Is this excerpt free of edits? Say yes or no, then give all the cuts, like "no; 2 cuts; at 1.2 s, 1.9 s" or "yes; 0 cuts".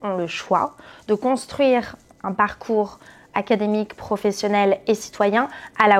yes; 0 cuts